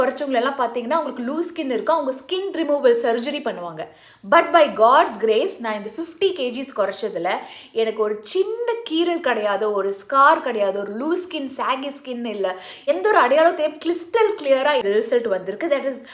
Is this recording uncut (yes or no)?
yes